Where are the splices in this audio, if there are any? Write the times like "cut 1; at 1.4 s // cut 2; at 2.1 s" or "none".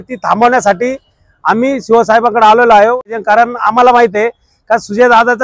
cut 1; at 3.0 s